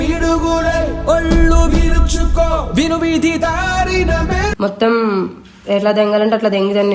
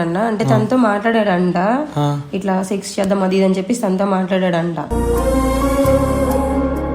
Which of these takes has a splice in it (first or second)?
first